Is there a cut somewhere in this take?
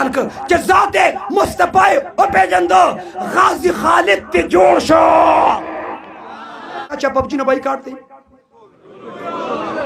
yes; 1 cut; at 7.0 s

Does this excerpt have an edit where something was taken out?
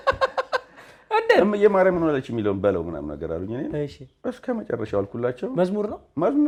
no; 0 cuts

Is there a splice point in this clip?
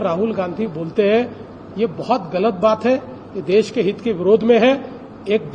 no; 0 cuts

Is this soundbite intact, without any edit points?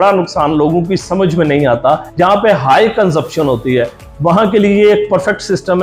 no; 1 cut; at 2.1 s

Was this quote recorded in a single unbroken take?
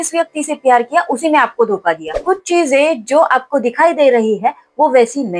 no; 1 cut; at 2.1 s

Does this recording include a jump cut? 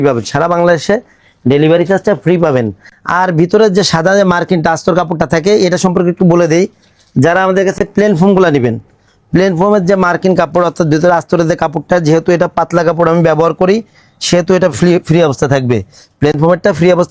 no; 0 cuts

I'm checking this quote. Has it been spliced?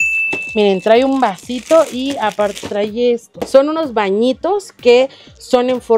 yes; 1 cut; at 3.5 s

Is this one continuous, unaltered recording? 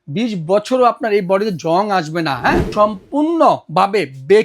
no; 1 cut; at 2.6 s

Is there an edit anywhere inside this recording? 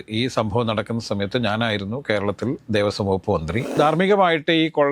yes; 1 cut; at 3.7 s

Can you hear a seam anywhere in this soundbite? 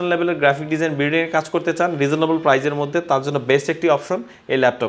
no; 0 cuts

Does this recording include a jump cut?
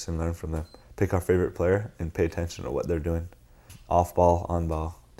yes; 1 cut; at 3.7 s

